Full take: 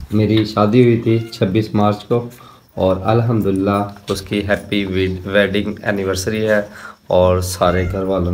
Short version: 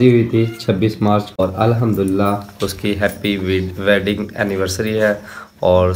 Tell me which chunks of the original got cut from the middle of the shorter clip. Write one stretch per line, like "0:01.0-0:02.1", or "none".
0:02.1-0:02.9